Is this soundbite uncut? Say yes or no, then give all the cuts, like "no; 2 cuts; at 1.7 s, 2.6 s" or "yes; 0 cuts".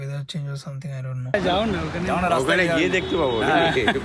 no; 1 cut; at 1.3 s